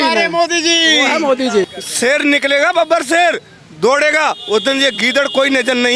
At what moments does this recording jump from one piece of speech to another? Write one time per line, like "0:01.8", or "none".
0:01.6